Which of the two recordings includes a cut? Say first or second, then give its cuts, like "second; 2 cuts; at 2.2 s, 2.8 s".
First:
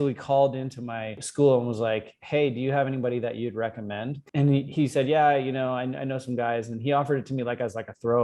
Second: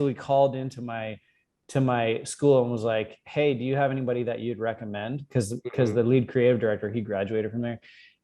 first; 2 cuts; at 1.2 s, 4.1 s